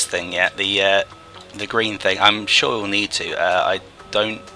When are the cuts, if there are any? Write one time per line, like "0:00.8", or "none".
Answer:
none